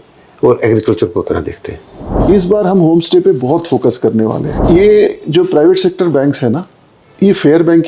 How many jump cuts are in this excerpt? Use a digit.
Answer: 2